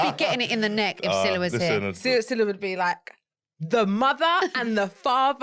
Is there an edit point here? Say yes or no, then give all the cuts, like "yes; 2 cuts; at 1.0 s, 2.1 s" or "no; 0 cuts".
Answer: no; 0 cuts